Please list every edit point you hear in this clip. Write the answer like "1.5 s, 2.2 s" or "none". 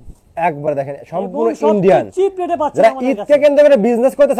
none